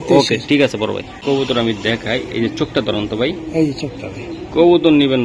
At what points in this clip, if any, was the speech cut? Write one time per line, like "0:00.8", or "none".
0:01.2